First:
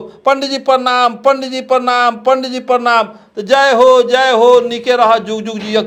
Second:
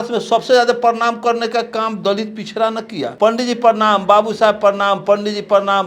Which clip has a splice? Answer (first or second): second